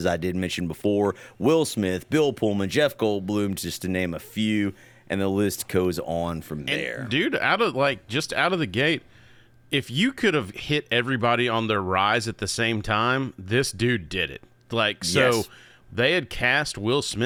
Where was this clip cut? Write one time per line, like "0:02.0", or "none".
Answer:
none